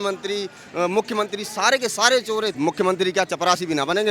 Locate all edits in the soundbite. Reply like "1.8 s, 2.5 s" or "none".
2.5 s

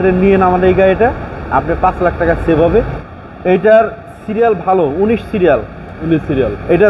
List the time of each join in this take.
3.0 s

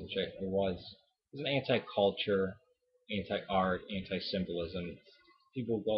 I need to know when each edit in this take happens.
3.5 s

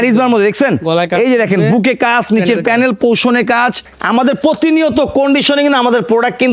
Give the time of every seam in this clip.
3.8 s

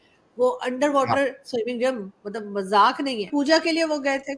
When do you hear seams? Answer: 3.3 s

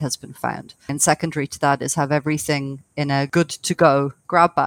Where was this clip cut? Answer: 0.9 s, 3.3 s

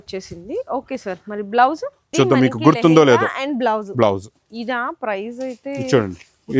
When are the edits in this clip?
2.1 s

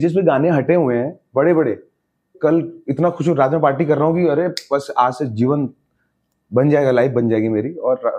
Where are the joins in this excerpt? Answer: none

